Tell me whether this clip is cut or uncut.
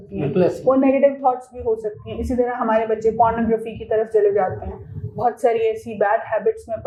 uncut